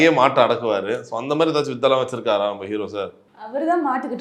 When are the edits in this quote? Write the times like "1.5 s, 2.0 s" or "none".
none